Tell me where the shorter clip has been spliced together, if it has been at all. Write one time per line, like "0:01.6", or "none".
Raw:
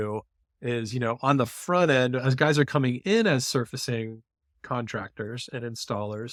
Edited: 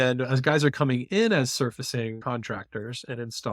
0:02.2